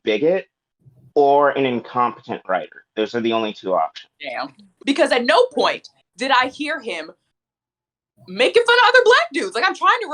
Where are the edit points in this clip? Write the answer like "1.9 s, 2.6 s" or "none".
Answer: 4.6 s